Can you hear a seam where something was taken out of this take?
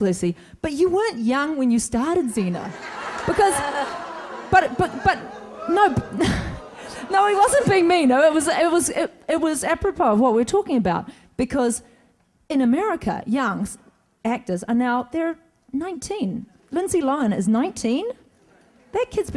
no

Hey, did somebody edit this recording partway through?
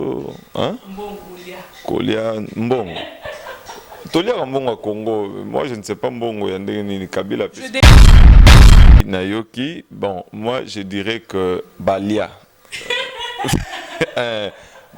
yes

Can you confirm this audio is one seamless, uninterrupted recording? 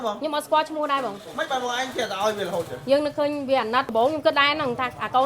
no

